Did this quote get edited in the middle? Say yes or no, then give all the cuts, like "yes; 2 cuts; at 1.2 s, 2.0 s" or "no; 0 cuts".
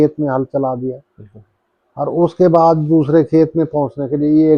no; 0 cuts